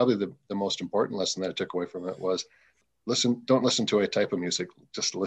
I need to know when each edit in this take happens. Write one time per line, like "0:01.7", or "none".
0:02.9